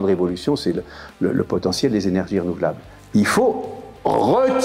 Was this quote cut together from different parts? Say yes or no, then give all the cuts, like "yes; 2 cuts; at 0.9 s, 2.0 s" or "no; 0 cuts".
yes; 1 cut; at 2.9 s